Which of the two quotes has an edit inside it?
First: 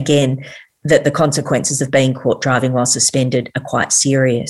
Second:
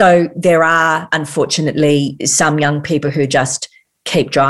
second; 2 cuts; at 1.1 s, 2.2 s

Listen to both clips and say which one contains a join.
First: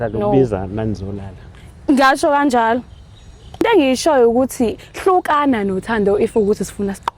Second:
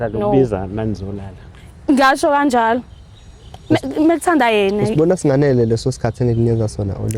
first; 1 cut; at 3.6 s

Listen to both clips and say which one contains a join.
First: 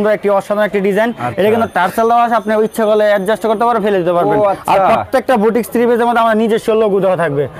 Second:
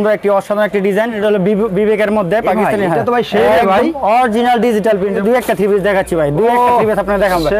second; 2 cuts; at 1.1 s, 5.2 s

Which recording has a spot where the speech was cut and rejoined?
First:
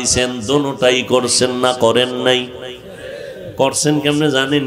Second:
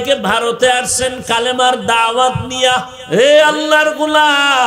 second; 1 cut; at 2.9 s

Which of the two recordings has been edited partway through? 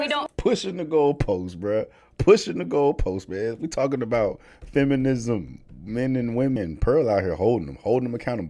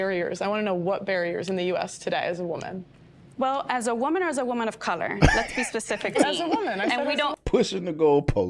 first; 1 cut; at 6.6 s

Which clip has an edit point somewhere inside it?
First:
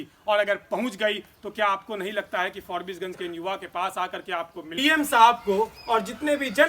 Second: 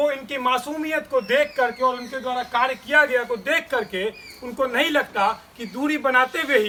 first; 1 cut; at 4.6 s

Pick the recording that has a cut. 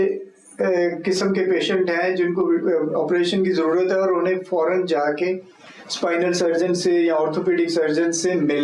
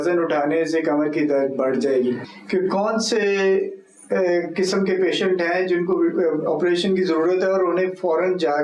second; 1 cut; at 2.3 s

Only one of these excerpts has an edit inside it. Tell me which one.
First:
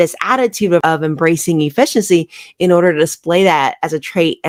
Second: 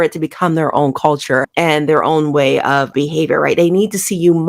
second; 1 cut; at 2.9 s

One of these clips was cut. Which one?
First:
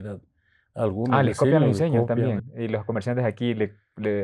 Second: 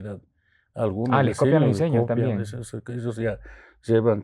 first; 1 cut; at 2.5 s

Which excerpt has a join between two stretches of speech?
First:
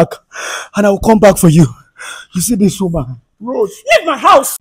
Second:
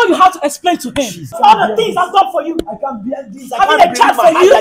second; 1 cut; at 1.4 s

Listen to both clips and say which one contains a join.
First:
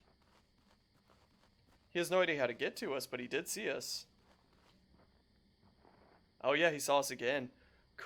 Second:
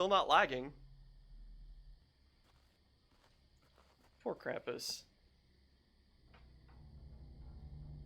second; 1 cut; at 2.0 s

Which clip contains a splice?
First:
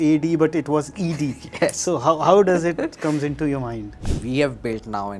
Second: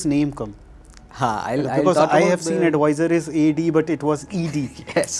first; 1 cut; at 3.9 s

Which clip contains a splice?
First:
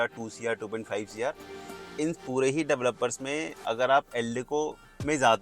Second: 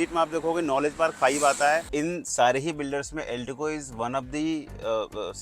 second; 1 cut; at 1.9 s

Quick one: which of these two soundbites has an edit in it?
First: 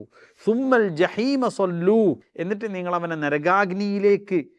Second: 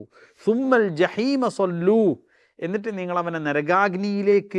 first; 1 cut; at 2.3 s

